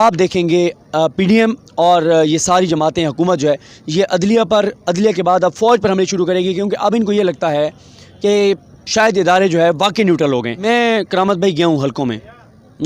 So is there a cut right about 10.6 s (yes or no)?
yes